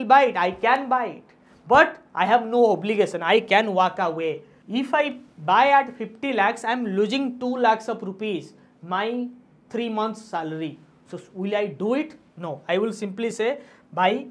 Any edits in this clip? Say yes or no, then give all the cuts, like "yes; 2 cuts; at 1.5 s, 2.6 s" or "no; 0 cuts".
yes; 1 cut; at 4.5 s